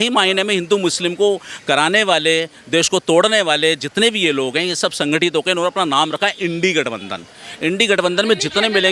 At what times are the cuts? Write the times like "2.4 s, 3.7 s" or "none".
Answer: none